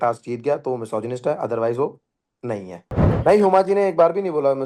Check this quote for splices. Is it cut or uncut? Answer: cut